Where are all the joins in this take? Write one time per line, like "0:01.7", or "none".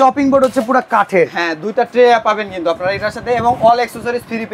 none